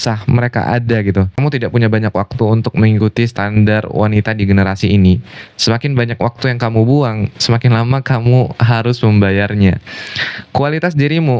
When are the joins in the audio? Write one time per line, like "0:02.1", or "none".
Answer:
0:01.3